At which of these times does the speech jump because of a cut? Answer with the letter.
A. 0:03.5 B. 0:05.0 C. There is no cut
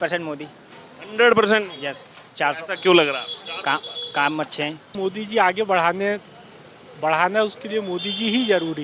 B